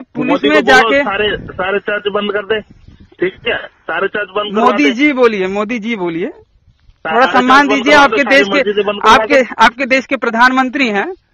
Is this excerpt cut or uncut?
uncut